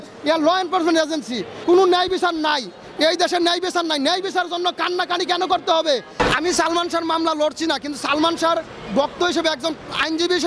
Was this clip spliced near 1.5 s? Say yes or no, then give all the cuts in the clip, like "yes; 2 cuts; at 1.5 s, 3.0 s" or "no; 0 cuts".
yes; 2 cuts; at 1.5 s, 6.1 s